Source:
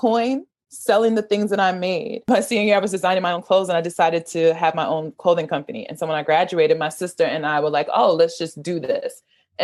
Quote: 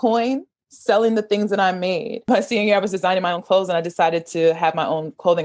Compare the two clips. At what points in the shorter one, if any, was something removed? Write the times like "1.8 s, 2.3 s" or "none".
none